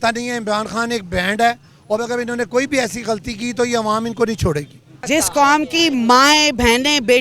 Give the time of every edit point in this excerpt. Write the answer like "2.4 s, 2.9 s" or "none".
4.9 s